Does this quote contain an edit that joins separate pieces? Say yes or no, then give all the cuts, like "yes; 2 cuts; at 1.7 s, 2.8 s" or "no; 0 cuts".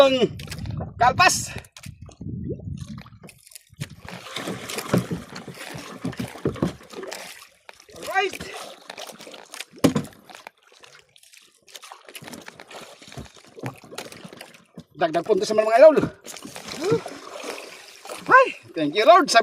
yes; 1 cut; at 4.0 s